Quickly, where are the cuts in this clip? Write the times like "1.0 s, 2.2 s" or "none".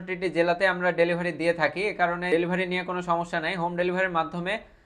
2.3 s